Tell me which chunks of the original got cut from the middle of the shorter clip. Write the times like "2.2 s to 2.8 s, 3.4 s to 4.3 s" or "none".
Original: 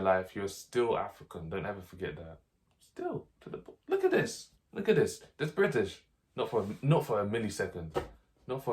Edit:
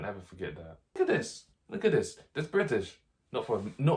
2.6 s to 4.0 s